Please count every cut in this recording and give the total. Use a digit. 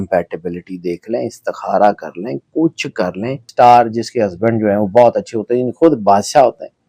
1